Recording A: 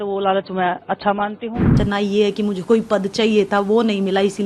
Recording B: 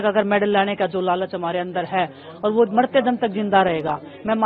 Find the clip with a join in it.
A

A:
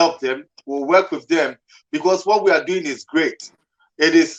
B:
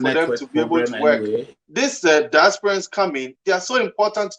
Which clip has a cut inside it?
B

